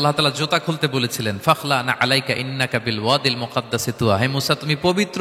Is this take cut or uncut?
uncut